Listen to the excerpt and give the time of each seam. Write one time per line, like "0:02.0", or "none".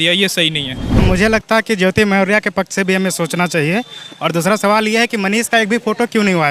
0:01.0